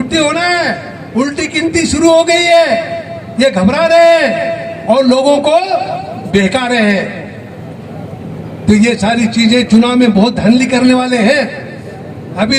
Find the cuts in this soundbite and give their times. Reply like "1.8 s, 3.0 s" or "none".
none